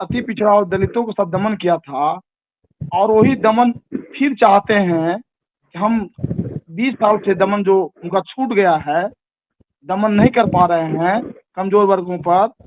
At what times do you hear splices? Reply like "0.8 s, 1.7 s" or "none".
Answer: none